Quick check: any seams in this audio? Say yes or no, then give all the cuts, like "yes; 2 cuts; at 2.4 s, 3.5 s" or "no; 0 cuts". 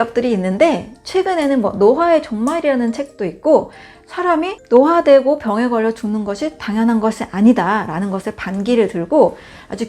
no; 0 cuts